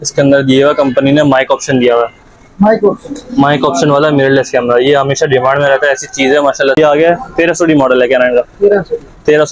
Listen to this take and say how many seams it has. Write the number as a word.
one